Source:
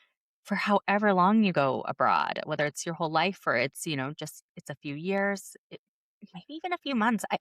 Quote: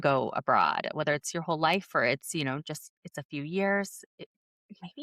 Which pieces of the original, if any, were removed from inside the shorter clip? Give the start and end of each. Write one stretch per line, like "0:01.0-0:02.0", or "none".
none